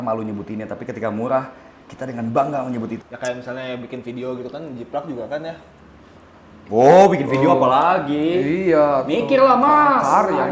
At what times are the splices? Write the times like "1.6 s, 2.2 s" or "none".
3.0 s

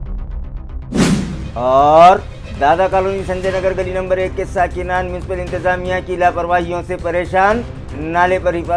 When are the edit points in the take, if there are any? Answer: none

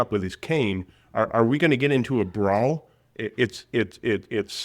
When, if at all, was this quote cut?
none

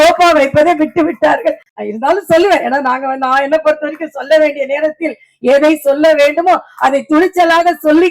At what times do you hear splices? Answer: 1.7 s

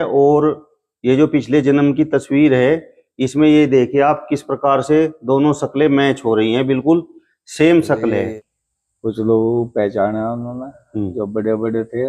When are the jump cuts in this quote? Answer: 8.3 s

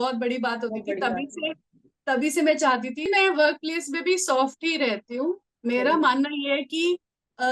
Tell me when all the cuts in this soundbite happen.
3.1 s

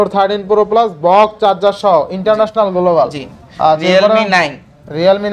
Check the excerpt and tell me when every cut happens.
none

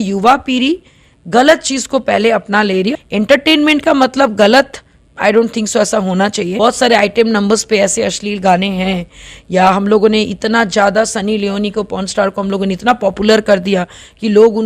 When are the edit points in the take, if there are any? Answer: 2.9 s, 6.5 s

